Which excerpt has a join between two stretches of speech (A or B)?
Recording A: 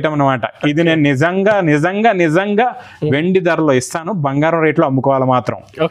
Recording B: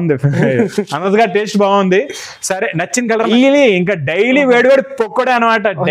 B